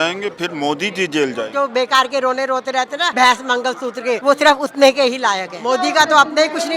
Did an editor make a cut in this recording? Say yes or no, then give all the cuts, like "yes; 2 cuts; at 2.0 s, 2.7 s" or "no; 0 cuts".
yes; 4 cuts; at 1.5 s, 3.1 s, 4.2 s, 5.5 s